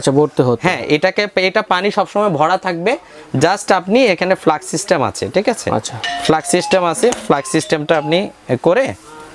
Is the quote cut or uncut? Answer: uncut